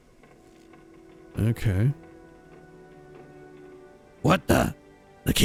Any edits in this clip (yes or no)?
no